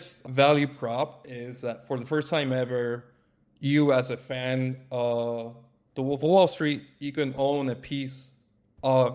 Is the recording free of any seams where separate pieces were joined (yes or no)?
yes